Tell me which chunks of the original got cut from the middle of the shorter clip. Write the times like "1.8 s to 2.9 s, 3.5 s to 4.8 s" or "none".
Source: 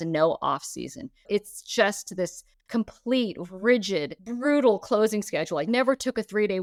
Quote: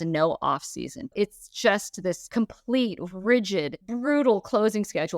1.0 s to 1.1 s, 2.4 s to 2.6 s